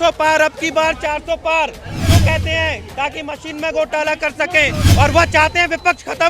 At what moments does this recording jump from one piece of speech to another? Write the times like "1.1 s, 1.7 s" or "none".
4.8 s